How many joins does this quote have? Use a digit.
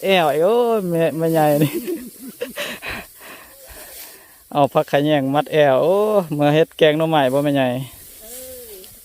1